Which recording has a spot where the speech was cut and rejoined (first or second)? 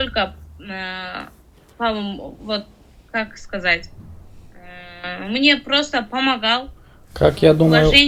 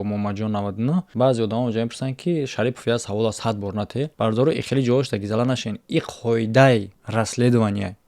second